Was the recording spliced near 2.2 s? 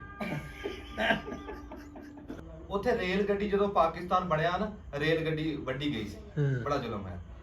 yes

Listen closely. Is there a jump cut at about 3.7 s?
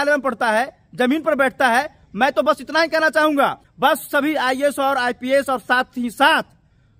yes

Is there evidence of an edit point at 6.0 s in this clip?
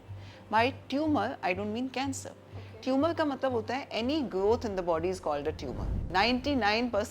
yes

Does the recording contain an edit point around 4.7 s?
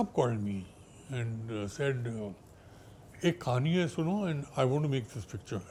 no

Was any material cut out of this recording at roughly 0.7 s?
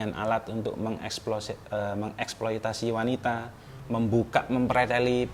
no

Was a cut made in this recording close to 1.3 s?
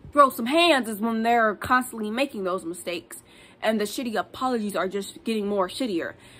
no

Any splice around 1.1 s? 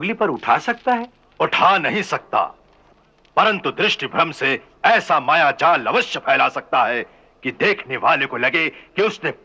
no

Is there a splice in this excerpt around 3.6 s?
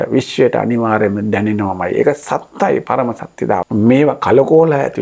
yes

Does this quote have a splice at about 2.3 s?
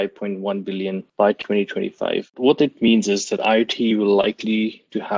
yes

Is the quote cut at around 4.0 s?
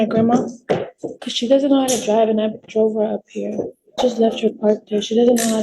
yes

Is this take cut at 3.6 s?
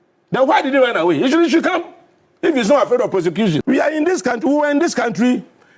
yes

